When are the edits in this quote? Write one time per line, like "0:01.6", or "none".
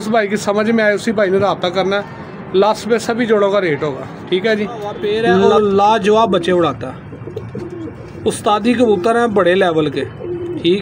0:05.0